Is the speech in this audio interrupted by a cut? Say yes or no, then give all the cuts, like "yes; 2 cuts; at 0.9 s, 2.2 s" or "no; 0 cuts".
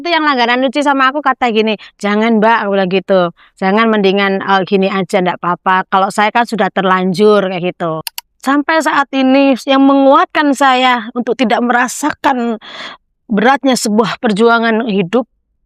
yes; 1 cut; at 8.0 s